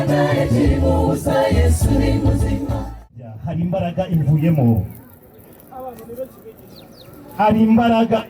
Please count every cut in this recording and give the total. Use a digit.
1